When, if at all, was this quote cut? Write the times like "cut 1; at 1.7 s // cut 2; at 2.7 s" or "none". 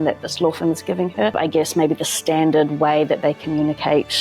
cut 1; at 1.3 s